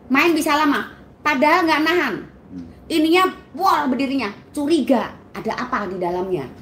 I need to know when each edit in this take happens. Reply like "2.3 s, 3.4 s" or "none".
none